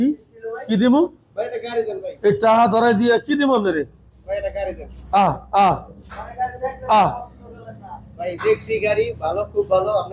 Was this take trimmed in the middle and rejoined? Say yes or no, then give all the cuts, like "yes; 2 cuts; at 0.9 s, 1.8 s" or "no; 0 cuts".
no; 0 cuts